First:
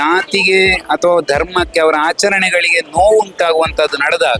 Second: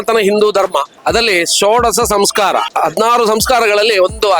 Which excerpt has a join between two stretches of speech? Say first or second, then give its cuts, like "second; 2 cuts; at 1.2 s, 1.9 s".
second; 2 cuts; at 0.9 s, 2.7 s